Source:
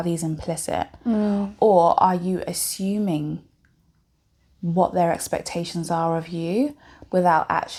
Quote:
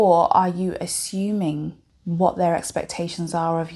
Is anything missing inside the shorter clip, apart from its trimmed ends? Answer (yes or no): yes